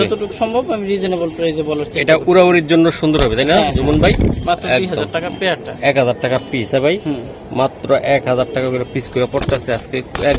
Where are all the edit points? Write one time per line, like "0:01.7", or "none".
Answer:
none

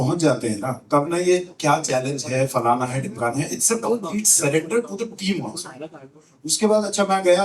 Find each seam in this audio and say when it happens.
none

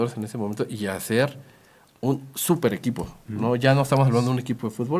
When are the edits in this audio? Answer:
none

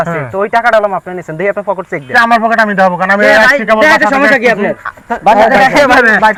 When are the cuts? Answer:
none

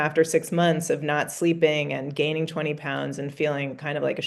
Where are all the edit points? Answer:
none

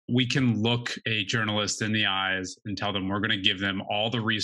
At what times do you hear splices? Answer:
0:00.9

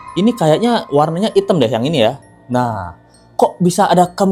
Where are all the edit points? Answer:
none

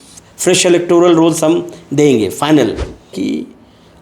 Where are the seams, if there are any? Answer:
0:03.1

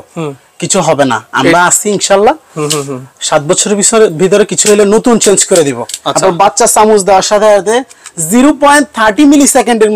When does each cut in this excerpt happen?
0:05.9

